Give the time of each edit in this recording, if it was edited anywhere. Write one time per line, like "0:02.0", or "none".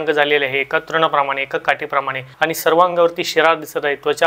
0:02.2